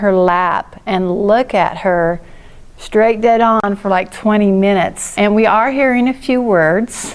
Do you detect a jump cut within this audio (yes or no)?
yes